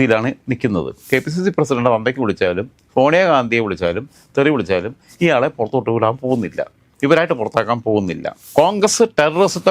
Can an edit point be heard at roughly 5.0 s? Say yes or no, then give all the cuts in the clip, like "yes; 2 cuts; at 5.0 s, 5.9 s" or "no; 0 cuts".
no; 2 cuts; at 1.1 s, 8.4 s